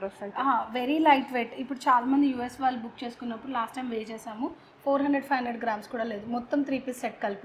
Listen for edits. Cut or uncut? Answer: uncut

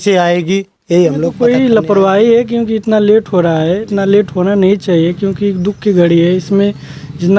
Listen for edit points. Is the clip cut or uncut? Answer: cut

